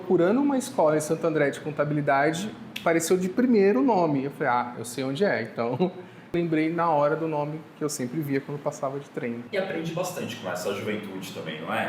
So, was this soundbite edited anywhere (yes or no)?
yes